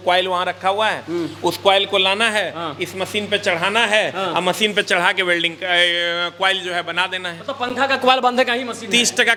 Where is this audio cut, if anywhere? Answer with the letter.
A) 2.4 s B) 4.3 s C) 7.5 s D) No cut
D